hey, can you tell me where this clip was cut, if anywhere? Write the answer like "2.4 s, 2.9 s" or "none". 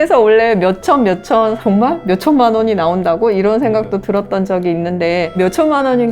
1.6 s, 5.3 s